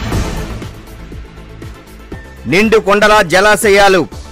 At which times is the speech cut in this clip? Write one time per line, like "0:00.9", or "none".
none